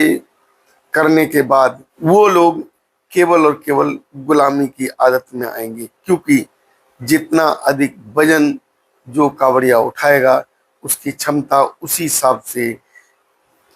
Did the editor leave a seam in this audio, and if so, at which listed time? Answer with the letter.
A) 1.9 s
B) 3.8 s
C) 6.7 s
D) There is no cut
A